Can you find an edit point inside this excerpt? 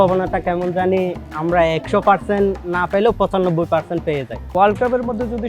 yes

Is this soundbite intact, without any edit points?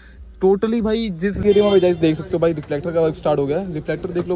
no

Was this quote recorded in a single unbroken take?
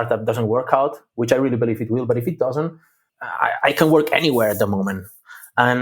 yes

